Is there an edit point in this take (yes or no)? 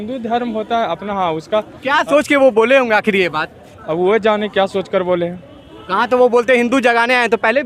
no